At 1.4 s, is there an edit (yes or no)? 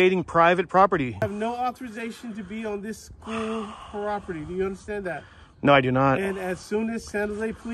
yes